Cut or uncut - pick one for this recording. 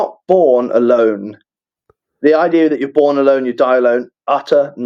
uncut